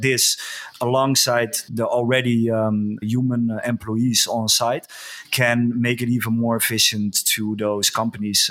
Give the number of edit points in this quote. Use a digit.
2